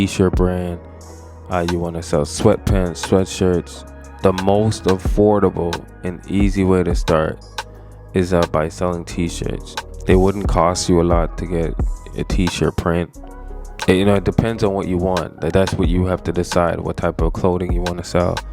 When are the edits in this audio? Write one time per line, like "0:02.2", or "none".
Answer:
none